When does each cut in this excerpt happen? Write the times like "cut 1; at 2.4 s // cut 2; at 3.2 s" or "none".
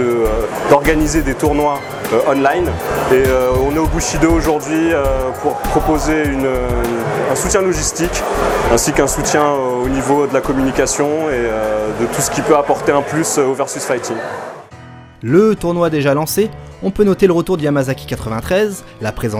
none